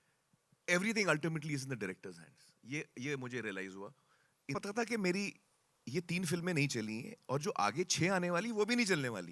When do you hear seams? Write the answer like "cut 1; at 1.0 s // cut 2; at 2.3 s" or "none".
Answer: cut 1; at 4.5 s